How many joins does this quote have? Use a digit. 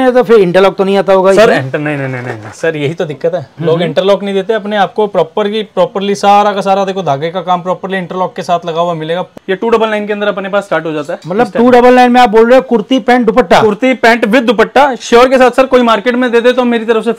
1